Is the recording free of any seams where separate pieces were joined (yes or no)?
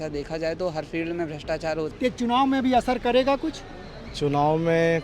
no